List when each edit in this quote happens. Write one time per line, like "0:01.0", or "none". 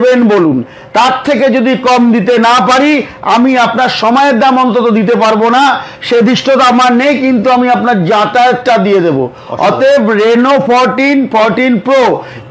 none